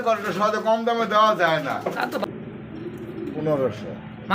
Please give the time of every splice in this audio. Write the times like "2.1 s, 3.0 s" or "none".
2.2 s

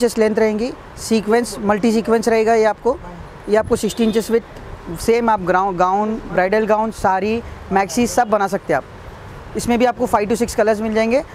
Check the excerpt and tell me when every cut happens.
none

